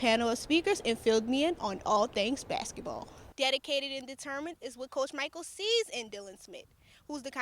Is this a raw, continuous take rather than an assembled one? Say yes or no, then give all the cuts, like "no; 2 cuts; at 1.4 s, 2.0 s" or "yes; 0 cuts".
no; 1 cut; at 3.2 s